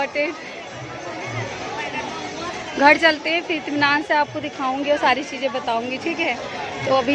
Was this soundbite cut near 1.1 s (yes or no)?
no